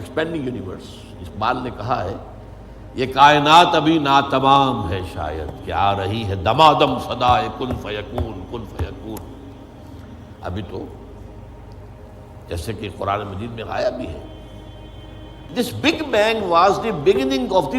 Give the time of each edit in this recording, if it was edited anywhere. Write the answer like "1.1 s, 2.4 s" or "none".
15.5 s